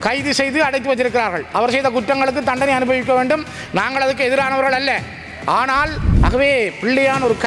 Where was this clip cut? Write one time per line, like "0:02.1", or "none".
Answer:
0:06.1